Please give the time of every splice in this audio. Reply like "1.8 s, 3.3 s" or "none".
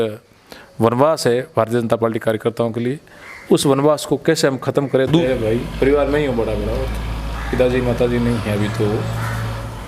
5.2 s